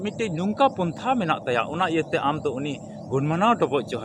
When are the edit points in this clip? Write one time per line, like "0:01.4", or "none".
none